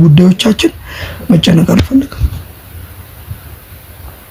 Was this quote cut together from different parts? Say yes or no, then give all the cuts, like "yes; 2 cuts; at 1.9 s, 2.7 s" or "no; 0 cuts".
no; 0 cuts